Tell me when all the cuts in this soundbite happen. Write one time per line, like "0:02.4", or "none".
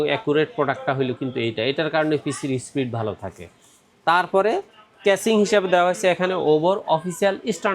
none